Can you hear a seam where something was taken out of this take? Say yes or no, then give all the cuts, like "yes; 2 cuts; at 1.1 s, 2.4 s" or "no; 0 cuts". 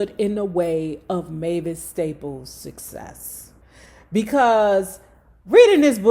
no; 0 cuts